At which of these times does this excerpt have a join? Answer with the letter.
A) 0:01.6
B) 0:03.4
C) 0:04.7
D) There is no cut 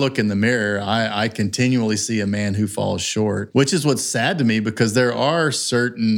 B